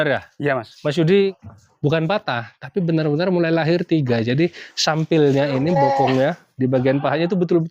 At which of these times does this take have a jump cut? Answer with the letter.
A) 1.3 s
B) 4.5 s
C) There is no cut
A